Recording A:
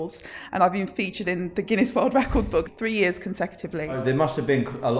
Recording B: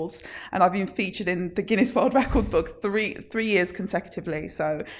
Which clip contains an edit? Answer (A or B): A